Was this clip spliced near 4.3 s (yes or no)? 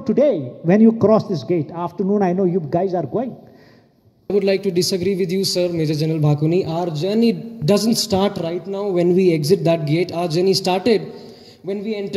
yes